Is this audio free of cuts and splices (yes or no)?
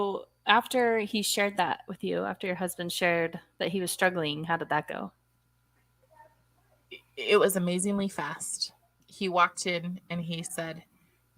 yes